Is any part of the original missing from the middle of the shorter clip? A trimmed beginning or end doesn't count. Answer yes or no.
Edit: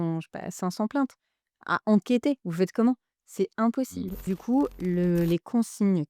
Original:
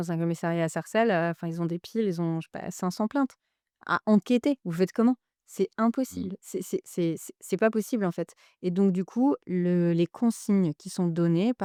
yes